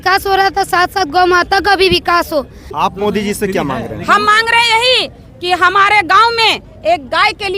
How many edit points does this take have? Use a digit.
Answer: 1